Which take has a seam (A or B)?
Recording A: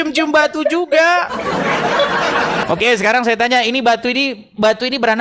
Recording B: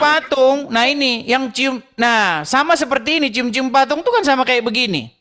A